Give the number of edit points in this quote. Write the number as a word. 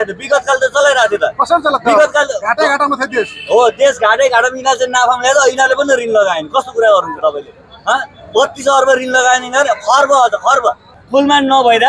one